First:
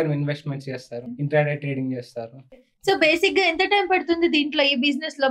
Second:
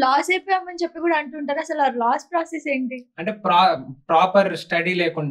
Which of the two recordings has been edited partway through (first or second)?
first